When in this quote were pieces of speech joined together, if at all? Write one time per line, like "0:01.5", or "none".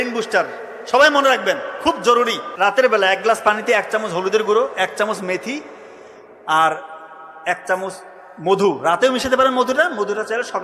0:02.5